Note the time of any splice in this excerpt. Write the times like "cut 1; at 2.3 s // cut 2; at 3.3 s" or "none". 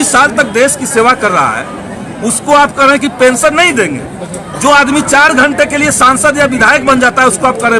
none